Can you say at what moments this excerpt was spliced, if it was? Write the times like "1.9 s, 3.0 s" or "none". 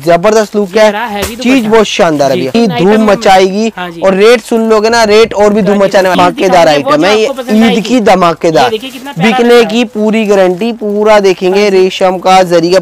2.5 s, 6.1 s